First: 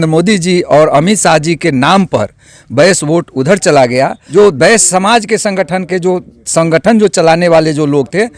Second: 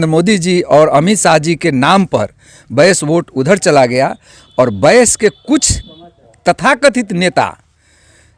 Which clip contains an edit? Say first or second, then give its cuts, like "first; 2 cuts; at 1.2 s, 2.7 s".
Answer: first; 1 cut; at 4.2 s